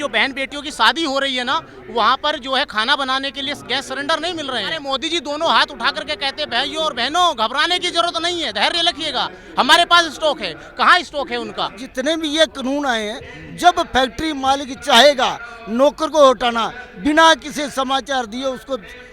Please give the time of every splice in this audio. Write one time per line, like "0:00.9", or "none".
0:04.8
0:11.9